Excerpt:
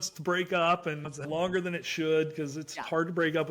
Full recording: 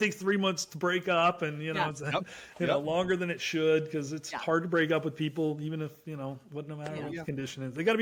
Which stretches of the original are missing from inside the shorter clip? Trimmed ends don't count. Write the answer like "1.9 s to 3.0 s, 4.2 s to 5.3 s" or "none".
1.8 s to 2.8 s